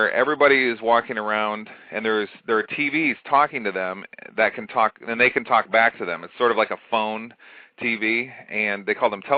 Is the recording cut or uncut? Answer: uncut